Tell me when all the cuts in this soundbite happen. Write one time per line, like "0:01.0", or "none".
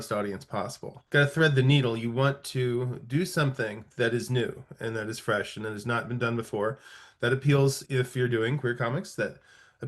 none